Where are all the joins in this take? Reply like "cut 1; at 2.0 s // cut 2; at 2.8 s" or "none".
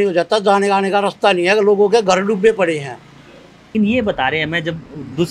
cut 1; at 3.7 s